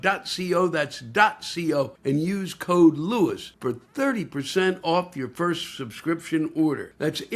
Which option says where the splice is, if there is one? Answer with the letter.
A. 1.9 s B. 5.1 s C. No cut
A